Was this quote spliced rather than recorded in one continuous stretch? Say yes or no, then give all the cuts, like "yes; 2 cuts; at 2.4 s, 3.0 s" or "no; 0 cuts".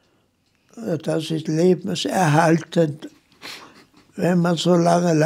no; 0 cuts